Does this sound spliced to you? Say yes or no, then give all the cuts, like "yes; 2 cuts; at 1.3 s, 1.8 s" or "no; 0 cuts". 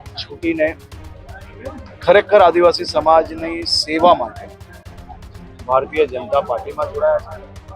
no; 0 cuts